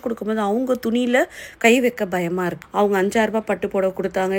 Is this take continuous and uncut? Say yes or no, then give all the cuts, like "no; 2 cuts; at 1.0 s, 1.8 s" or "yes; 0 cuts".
no; 1 cut; at 2.6 s